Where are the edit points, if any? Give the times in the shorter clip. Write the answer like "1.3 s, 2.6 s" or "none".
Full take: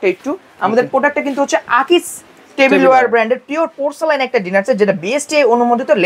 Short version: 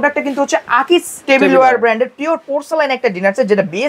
1.1 s

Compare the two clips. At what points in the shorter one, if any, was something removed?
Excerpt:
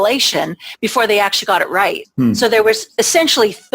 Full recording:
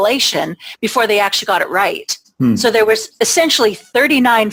2.0 s

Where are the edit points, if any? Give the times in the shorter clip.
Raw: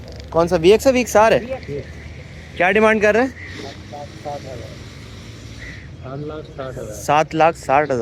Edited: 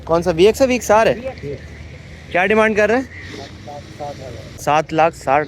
4.6 s

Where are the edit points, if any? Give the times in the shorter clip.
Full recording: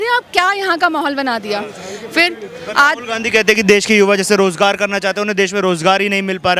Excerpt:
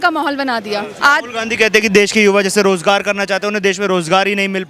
0.9 s

